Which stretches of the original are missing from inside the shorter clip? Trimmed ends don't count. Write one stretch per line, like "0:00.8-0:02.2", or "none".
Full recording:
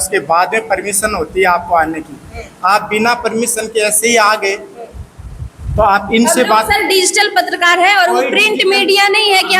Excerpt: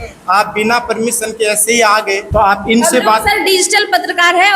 0:04.6-0:05.7